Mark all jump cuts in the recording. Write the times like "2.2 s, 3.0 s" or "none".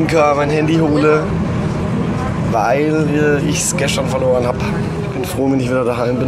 5.0 s